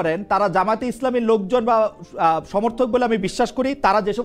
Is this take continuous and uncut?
yes; 0 cuts

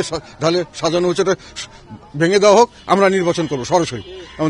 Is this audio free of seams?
yes; 0 cuts

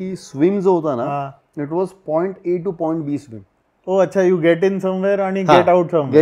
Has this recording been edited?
no; 0 cuts

